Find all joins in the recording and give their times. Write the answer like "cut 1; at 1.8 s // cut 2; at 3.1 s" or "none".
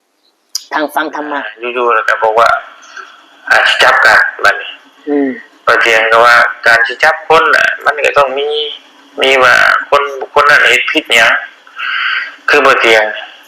cut 1; at 1.6 s

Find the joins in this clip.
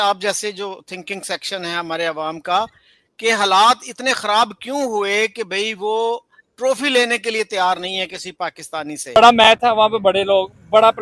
cut 1; at 9.2 s

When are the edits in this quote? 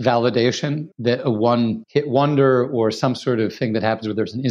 cut 1; at 0.9 s // cut 2; at 1.8 s

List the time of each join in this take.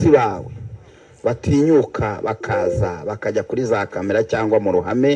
none

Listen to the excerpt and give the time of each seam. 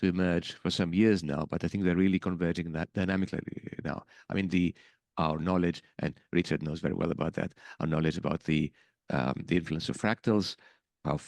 none

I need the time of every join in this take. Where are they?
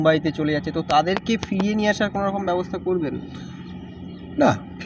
none

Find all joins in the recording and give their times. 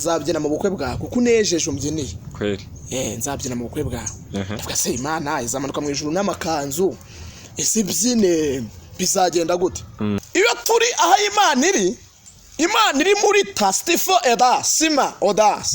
cut 1; at 10.2 s

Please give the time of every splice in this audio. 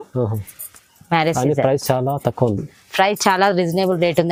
none

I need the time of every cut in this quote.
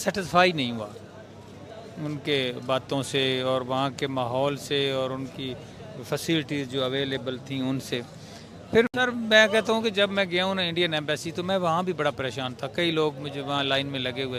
cut 1; at 8.9 s

